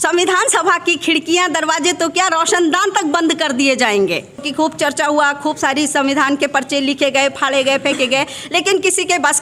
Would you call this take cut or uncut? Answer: cut